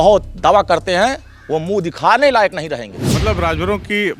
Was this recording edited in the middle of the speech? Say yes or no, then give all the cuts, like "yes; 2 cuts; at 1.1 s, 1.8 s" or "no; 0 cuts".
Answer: yes; 1 cut; at 3.1 s